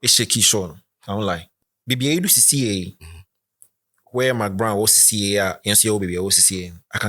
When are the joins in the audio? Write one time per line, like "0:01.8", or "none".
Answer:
0:01.6